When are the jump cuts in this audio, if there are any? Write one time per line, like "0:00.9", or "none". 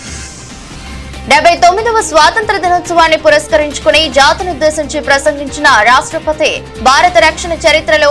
none